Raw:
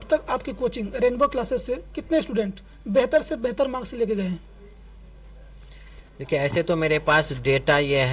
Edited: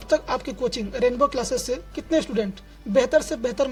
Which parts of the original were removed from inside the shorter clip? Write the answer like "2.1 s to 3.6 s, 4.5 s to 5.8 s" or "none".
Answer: none